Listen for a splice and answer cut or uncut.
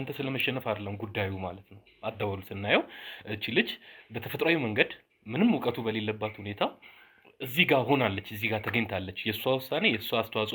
uncut